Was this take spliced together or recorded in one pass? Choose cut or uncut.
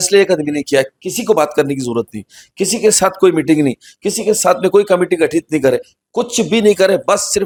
uncut